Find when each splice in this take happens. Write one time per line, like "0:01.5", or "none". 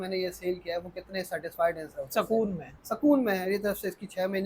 0:03.4